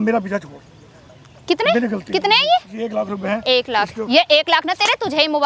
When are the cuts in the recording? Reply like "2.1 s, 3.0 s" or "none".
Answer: none

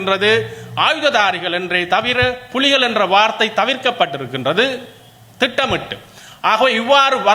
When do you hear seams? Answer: none

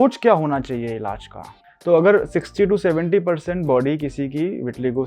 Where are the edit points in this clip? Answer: 1.6 s

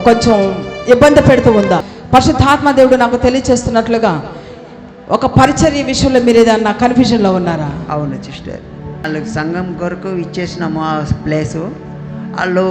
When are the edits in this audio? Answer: 1.9 s, 9.0 s

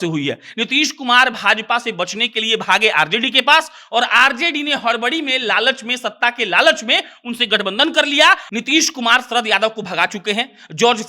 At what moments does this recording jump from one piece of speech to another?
8.4 s

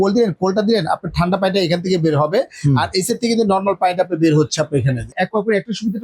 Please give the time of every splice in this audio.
5.1 s

